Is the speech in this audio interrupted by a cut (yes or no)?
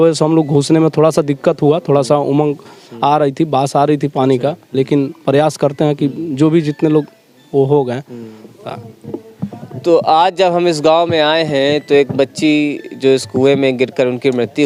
no